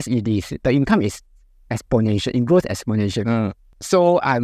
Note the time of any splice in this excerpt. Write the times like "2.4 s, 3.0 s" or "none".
none